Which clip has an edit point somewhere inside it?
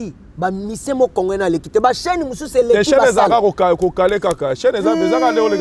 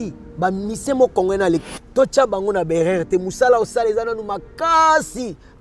second; 1 cut; at 1.6 s

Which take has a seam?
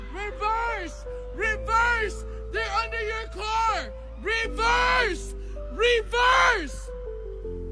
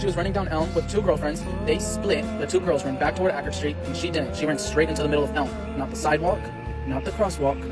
first; 1 cut; at 6.8 s

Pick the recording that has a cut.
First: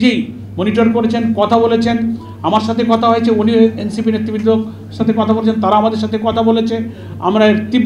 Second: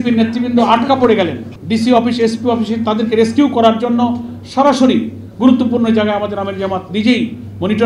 second; 1 cut; at 1.5 s

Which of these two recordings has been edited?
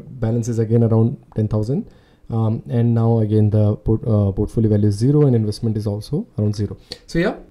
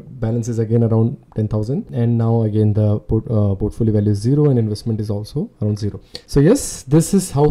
second; 2 cuts; at 1.9 s, 6.2 s

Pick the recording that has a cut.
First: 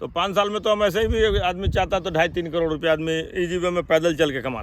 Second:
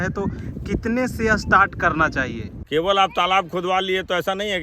second; 1 cut; at 2.5 s

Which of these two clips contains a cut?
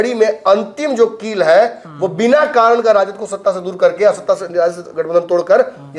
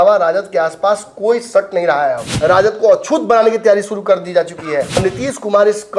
second; 2 cuts; at 2.3 s, 5.0 s

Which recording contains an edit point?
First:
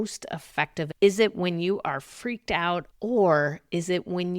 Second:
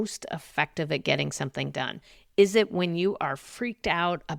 first; 2 cuts; at 0.9 s, 2.9 s

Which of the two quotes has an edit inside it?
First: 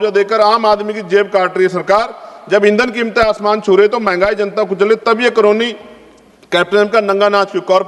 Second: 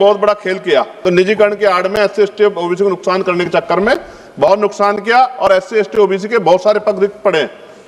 second; 1 cut; at 0.9 s

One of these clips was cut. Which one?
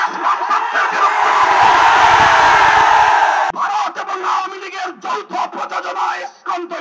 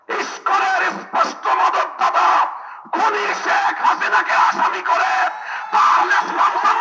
first; 1 cut; at 3.5 s

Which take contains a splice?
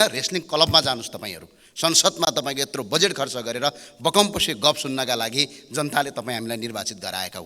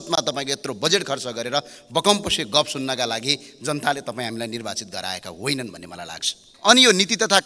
second; 1 cut; at 6.5 s

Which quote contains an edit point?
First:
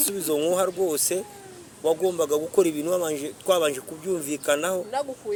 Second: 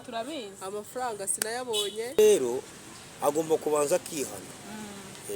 second; 1 cut; at 2.2 s

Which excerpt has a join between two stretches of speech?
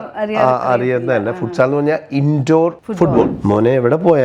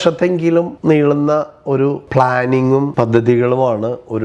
first; 1 cut; at 3.3 s

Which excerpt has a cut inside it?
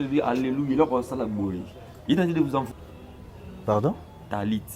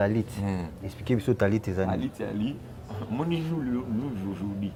first; 1 cut; at 2.7 s

